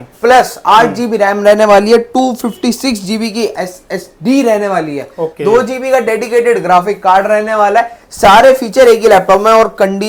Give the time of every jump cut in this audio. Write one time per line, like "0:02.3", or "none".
none